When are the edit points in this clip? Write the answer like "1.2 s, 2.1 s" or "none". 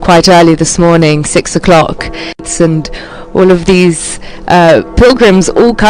2.9 s